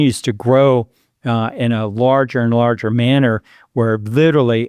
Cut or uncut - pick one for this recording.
uncut